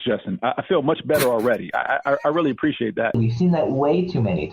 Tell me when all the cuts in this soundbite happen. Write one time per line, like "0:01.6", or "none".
0:03.2